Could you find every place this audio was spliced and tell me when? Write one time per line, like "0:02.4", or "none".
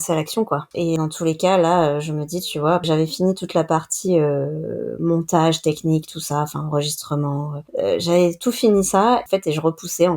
0:00.9
0:02.8
0:07.6
0:09.2